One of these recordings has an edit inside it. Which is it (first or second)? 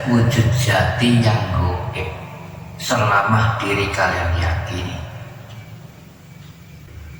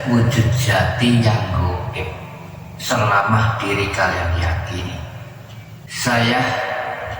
second